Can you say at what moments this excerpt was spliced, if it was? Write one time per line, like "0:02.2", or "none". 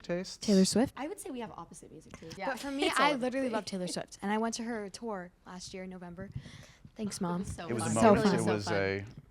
0:00.9
0:02.2